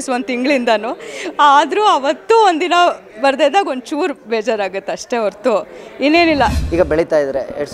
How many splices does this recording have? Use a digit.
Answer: 1